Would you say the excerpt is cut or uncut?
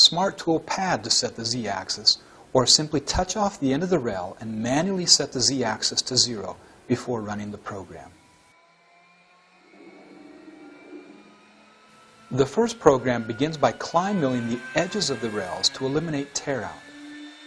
cut